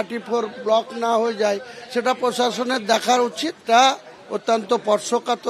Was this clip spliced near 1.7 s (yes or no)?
no